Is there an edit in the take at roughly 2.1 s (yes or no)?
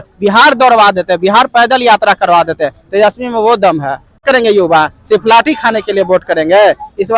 no